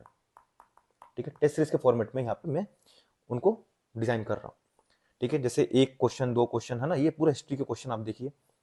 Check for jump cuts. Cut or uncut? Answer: uncut